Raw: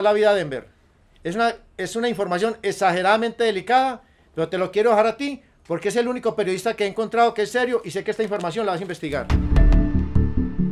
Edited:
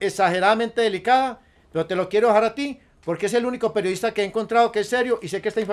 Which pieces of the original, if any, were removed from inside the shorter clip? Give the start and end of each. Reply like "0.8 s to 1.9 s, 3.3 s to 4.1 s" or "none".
none